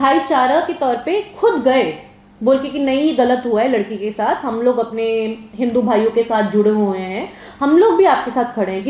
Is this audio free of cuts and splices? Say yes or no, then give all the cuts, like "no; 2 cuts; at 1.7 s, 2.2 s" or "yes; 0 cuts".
yes; 0 cuts